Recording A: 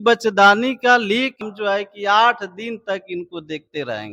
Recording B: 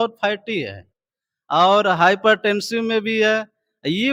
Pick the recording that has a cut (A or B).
A